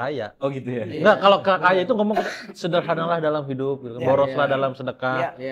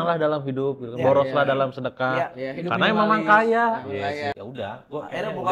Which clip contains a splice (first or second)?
second